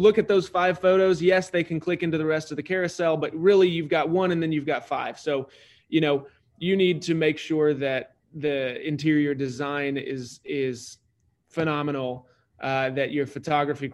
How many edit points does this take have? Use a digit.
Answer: 0